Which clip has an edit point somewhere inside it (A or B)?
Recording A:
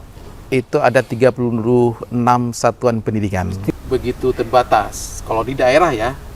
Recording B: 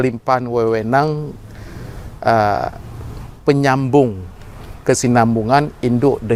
A